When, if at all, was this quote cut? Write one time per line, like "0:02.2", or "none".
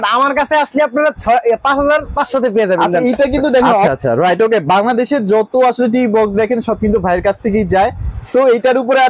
0:03.6